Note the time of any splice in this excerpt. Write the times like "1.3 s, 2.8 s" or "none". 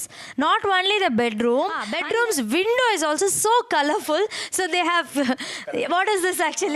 1.9 s